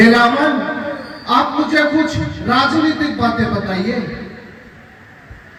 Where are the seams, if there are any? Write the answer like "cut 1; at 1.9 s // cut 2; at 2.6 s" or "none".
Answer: none